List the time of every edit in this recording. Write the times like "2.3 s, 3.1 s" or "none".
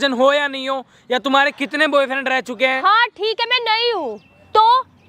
none